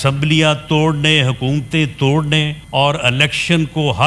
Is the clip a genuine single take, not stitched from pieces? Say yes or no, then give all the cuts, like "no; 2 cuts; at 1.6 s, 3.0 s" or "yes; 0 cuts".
no; 1 cut; at 2.6 s